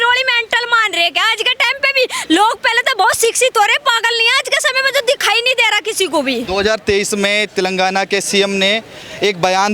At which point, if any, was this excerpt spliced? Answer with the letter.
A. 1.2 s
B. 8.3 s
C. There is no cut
C